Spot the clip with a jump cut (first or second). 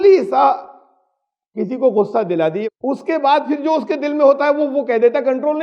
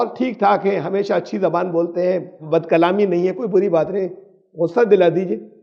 first